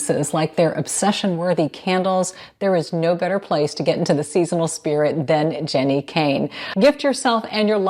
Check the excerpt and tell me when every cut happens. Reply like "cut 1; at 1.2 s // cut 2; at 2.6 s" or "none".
cut 1; at 6.6 s